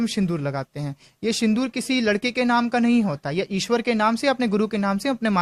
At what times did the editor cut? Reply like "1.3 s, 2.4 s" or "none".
none